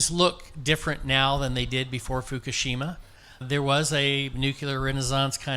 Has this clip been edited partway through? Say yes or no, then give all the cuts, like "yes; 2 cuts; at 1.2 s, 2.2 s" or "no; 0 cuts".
yes; 1 cut; at 3.4 s